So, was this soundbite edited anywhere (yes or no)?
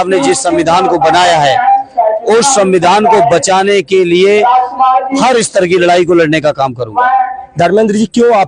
no